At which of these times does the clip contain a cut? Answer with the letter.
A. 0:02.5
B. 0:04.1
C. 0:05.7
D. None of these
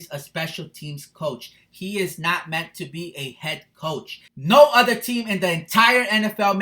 B